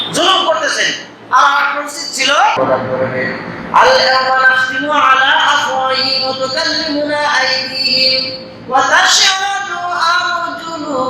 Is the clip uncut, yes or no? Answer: no